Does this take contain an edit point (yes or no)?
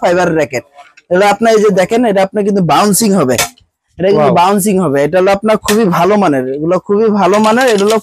no